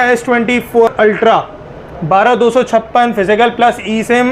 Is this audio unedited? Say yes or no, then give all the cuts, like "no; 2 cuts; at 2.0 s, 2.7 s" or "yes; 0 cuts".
no; 1 cut; at 0.9 s